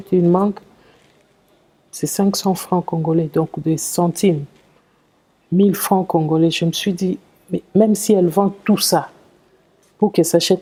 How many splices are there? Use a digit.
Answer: 0